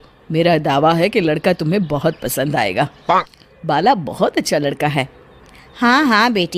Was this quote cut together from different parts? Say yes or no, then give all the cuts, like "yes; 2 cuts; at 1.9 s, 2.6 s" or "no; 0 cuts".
no; 0 cuts